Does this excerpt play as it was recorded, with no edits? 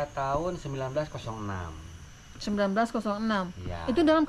yes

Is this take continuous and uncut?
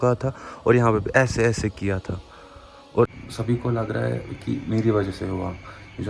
no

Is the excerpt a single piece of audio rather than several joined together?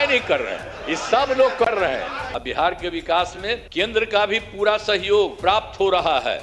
no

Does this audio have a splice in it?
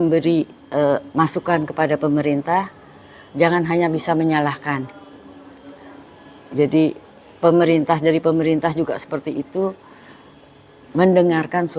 no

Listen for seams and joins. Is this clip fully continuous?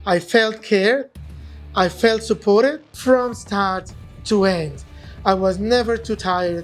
no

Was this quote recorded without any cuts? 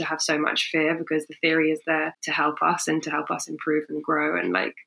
no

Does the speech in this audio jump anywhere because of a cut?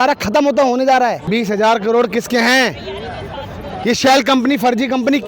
yes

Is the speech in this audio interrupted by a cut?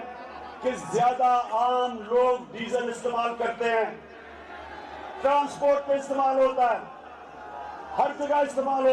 no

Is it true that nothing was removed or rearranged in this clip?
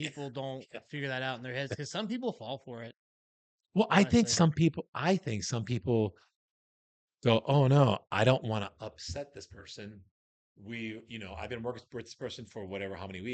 yes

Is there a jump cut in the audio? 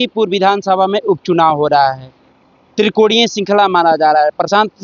no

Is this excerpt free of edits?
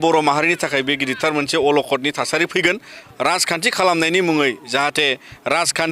no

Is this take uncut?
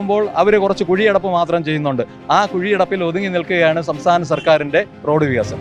yes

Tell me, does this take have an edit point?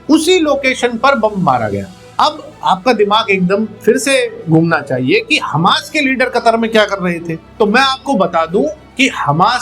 no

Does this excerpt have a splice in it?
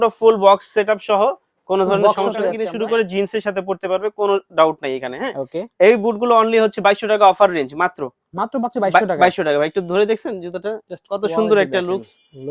yes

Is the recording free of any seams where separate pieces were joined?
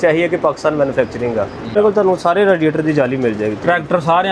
no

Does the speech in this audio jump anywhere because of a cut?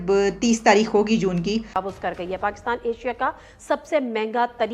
yes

